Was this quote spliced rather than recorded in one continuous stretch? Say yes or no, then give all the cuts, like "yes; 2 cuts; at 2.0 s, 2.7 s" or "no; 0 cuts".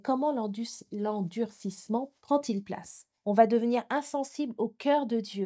yes; 1 cut; at 3.1 s